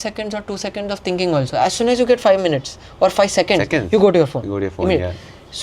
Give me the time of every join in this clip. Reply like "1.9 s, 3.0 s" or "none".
none